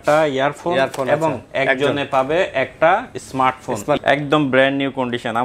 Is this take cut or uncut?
cut